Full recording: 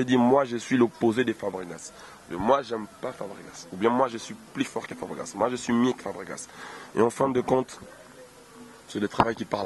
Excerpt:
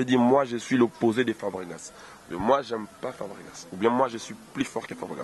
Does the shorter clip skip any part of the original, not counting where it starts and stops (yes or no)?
no